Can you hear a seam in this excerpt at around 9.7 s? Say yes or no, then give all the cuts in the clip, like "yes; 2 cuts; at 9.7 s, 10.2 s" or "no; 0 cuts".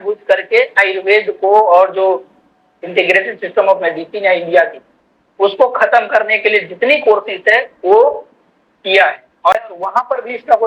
yes; 1 cut; at 9.7 s